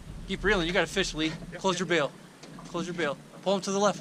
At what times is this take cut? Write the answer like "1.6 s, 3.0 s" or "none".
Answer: none